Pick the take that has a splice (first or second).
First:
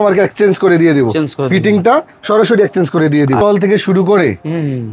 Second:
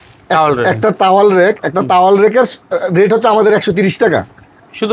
first